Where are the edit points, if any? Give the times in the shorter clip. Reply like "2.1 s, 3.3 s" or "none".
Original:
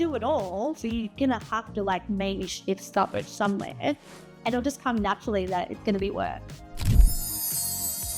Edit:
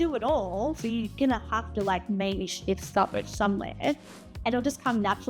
none